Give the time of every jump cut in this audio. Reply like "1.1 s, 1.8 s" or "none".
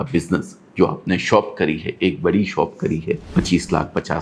3.2 s